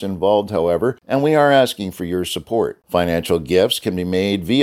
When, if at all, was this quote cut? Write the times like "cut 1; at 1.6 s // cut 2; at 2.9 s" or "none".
cut 1; at 1.0 s